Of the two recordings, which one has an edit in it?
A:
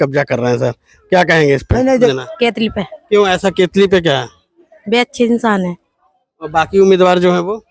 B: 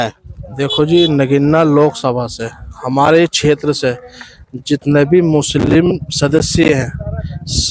A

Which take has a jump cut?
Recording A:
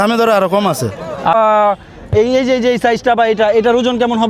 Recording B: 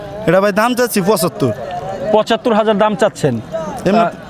A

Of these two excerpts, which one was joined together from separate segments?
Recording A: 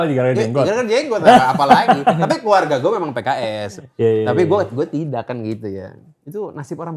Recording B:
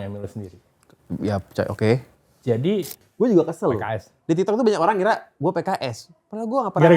B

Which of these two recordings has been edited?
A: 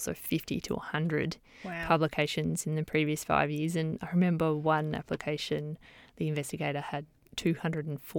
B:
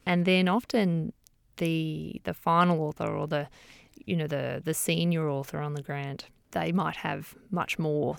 B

